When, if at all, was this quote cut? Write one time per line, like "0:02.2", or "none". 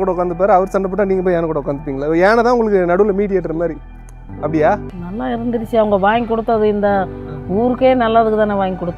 0:05.0